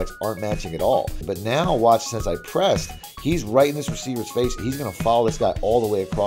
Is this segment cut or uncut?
cut